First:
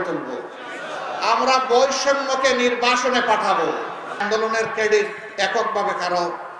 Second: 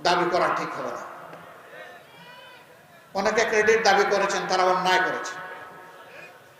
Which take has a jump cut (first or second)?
first